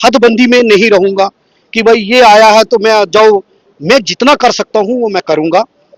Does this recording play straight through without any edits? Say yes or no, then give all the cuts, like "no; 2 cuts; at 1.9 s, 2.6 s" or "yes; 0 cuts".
yes; 0 cuts